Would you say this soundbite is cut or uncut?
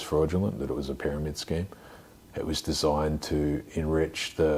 uncut